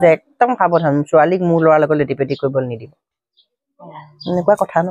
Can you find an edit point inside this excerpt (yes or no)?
no